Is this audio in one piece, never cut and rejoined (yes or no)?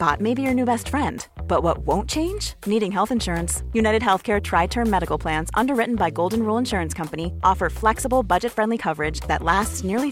yes